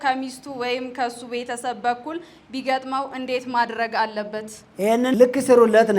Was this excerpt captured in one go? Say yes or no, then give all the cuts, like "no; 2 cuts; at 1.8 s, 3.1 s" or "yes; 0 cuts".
no; 1 cut; at 5.0 s